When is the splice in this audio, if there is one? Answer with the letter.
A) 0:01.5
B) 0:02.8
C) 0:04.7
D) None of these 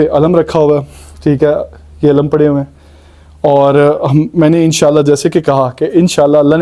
D